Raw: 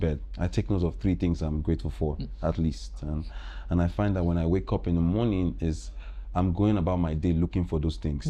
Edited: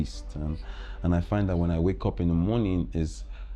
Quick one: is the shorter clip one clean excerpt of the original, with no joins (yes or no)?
yes